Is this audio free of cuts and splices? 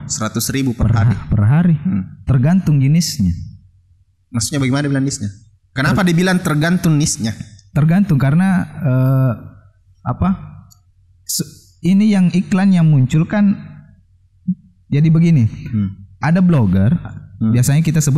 yes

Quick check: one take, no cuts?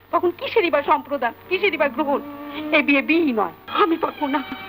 no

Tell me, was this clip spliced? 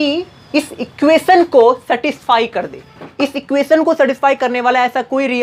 no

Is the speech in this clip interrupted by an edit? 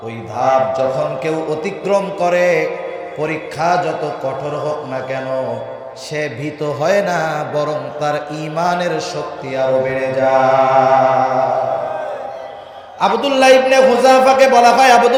no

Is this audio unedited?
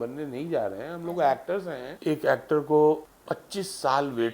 no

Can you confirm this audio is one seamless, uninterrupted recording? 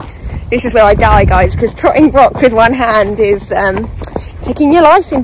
yes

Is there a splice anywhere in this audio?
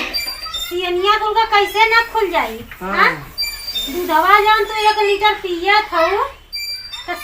no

